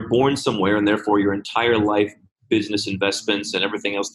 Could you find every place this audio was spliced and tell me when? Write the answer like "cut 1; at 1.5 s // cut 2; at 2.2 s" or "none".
cut 1; at 2.3 s